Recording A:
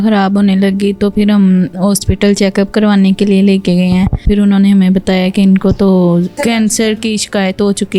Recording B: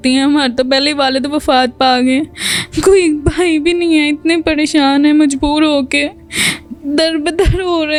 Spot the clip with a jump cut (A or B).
A